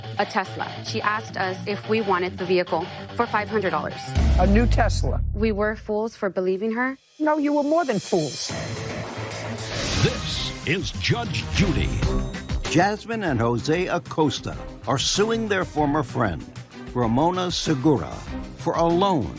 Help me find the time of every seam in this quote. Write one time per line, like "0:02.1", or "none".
0:10.7